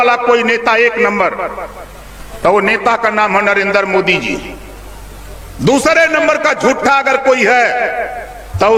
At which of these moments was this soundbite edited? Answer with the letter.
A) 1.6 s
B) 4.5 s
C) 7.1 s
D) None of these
D